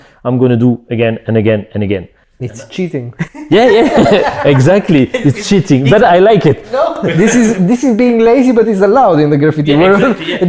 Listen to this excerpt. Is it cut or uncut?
uncut